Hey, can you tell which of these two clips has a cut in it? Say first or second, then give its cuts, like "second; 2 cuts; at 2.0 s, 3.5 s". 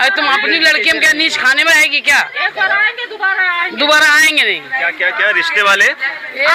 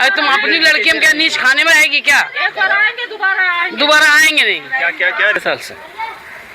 second; 1 cut; at 5.4 s